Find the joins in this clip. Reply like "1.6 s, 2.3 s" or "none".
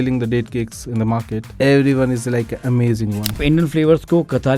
1.5 s, 3.4 s